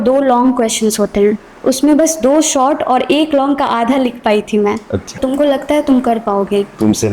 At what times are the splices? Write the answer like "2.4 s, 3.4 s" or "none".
5.2 s